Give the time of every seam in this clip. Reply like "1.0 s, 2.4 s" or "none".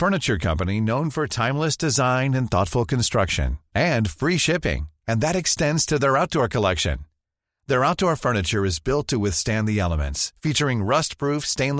none